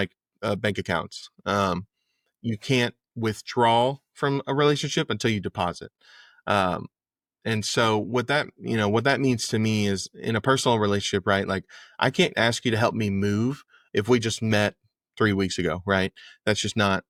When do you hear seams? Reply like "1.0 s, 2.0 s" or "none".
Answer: none